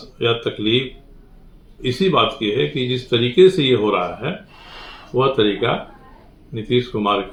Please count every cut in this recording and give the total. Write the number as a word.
zero